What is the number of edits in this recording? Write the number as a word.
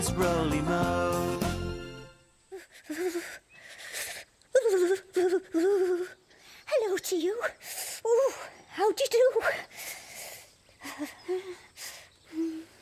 one